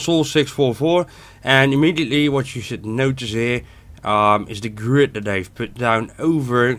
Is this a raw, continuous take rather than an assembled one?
yes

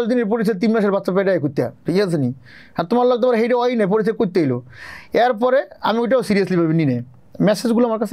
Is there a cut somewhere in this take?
no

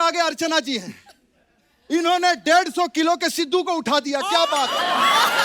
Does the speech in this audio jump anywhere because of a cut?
no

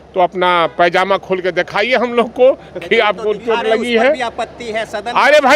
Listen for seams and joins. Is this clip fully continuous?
yes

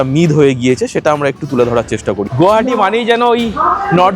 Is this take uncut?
no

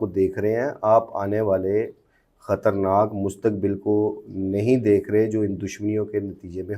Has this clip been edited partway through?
no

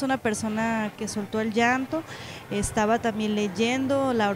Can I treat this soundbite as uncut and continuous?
no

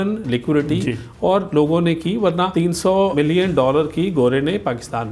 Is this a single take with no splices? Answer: no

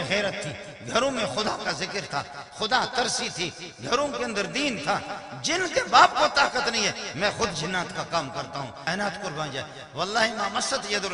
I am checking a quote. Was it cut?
yes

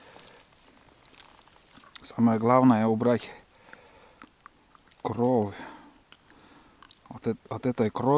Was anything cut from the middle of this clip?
no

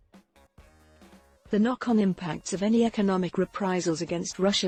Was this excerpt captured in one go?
yes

